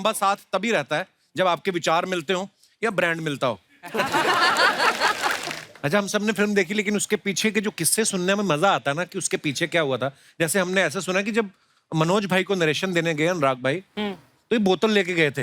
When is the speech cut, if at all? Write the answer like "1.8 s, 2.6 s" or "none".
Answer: 5.5 s